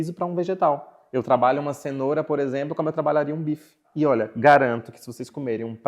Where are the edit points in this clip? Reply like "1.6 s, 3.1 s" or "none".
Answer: 3.8 s